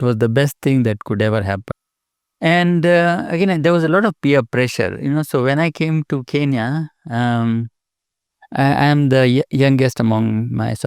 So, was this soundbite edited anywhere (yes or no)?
yes